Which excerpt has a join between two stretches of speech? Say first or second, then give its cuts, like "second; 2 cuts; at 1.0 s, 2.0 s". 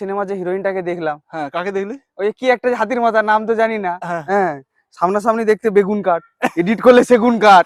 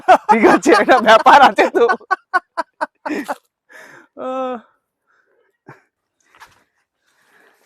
second; 1 cut; at 6.0 s